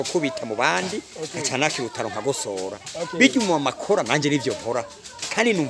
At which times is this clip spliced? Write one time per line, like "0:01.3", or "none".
none